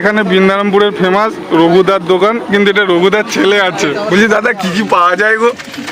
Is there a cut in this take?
yes; 1 cut; at 4.1 s

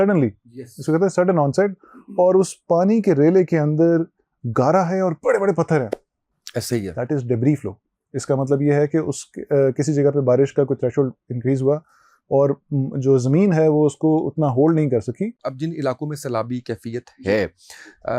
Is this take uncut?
no; 1 cut; at 15.5 s

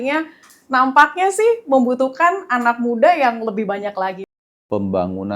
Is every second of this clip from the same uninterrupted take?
no; 1 cut; at 4.2 s

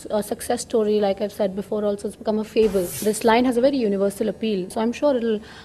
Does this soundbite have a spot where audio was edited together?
yes; 2 cuts; at 3.0 s, 4.7 s

